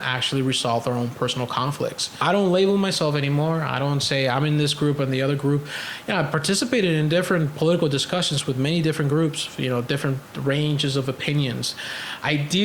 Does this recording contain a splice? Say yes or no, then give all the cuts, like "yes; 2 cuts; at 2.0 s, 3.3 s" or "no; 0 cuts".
yes; 1 cut; at 2.2 s